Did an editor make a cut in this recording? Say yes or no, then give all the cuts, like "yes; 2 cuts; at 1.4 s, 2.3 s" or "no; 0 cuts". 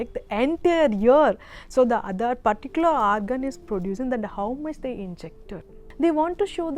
yes; 1 cut; at 5.9 s